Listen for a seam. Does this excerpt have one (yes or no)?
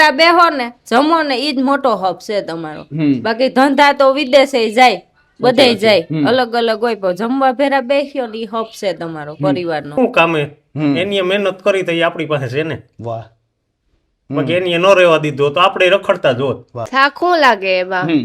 yes